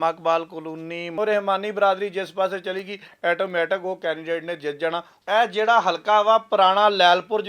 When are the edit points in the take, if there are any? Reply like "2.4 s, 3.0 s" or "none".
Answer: 1.0 s, 5.1 s